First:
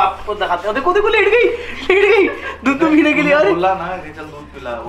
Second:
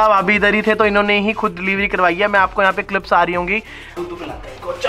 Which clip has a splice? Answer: second; 1 cut; at 3.9 s

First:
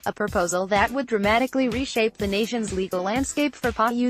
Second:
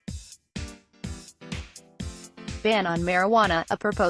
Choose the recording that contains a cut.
second; 1 cut; at 2.6 s

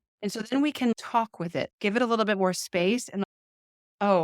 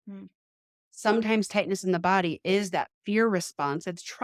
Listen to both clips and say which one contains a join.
first; 1 cut; at 0.9 s

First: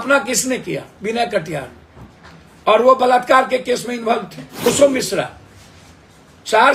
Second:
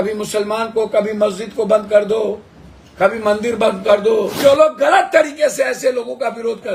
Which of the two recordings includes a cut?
second; 1 cut; at 4.4 s

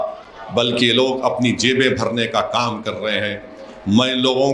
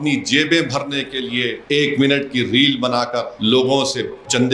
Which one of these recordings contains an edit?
second; 2 cuts; at 1.6 s, 3.3 s

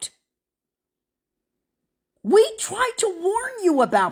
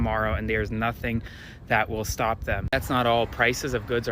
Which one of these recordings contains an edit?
second; 1 cut; at 2.7 s

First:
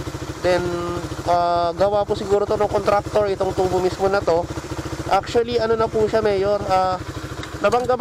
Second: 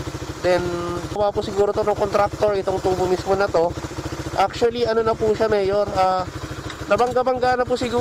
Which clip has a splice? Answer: second; 1 cut; at 1.2 s

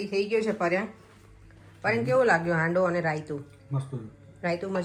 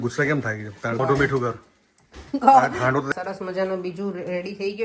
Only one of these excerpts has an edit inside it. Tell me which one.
second; 2 cuts; at 1.0 s, 3.1 s

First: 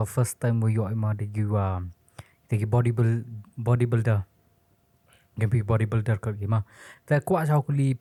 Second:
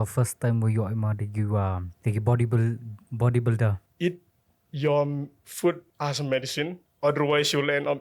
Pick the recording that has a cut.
second; 4 cuts; at 1.9 s, 3.8 s, 5.9 s, 6.8 s

